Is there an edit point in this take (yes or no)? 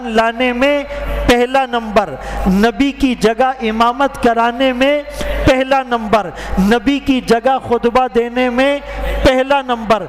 no